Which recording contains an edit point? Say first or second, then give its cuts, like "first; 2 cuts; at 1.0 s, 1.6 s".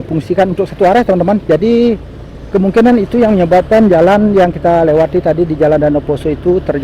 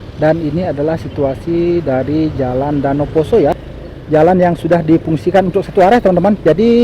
second; 1 cut; at 3.6 s